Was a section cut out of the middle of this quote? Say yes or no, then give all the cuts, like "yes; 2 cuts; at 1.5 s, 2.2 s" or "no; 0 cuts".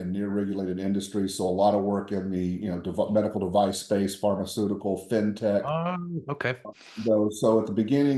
no; 0 cuts